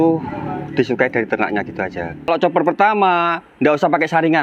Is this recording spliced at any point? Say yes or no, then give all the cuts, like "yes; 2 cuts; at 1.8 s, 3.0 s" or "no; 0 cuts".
yes; 1 cut; at 2.3 s